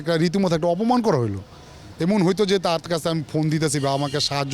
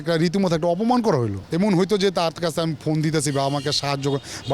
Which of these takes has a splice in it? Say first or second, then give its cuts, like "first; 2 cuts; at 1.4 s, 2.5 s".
second; 1 cut; at 1.4 s